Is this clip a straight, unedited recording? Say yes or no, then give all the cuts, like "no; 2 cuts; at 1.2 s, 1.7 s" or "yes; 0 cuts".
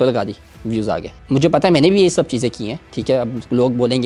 yes; 0 cuts